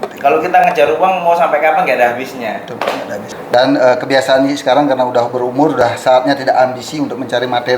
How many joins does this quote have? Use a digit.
1